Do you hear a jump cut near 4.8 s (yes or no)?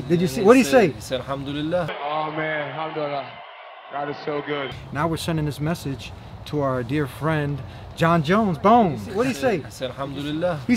yes